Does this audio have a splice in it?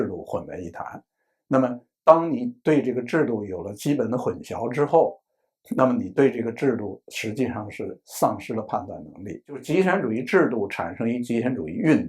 yes; 1 cut; at 9.6 s

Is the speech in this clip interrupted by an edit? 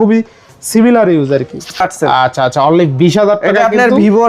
yes; 1 cut; at 1.8 s

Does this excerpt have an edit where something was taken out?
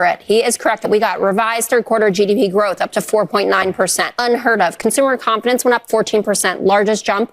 yes; 2 cuts; at 0.9 s, 4.1 s

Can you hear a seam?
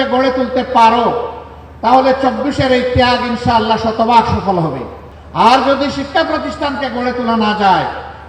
no; 0 cuts

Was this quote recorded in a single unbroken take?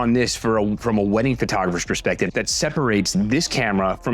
no; 1 cut; at 2.3 s

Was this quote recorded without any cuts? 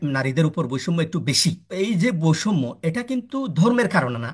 no; 1 cut; at 1.7 s

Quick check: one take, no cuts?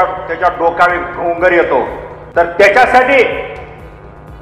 no; 1 cut; at 2.5 s

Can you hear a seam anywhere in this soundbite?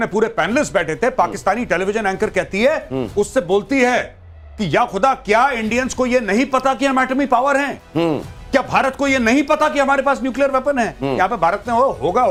no; 0 cuts

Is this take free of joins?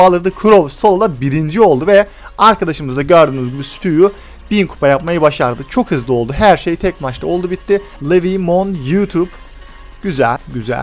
no; 1 cut; at 7.9 s

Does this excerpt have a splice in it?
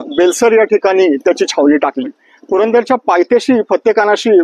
yes; 1 cut; at 2.3 s

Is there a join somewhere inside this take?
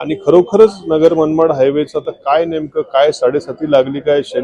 no; 0 cuts

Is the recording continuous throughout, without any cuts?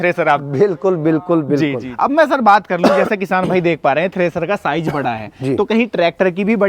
no; 1 cut; at 1.8 s

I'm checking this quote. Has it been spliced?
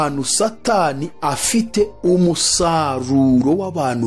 no; 0 cuts

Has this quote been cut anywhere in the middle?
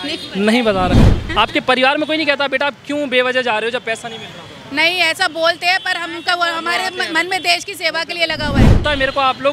yes; 2 cuts; at 1.0 s, 8.7 s

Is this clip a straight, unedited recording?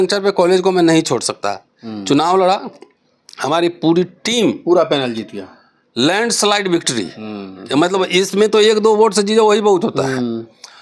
yes; 0 cuts

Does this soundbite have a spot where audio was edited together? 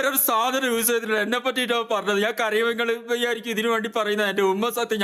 no; 0 cuts

